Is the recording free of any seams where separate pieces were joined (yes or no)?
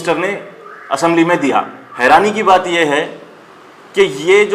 no